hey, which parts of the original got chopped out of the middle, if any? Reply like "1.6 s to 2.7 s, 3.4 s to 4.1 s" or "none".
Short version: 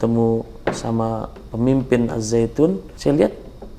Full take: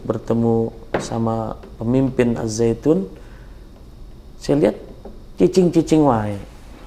3.2 s to 4.3 s